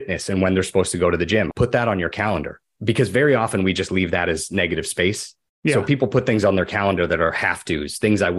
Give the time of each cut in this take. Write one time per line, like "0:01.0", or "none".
0:01.5
0:02.7